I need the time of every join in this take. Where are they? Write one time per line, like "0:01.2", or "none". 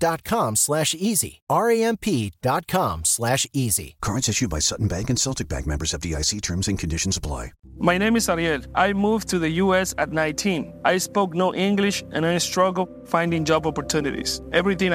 0:07.6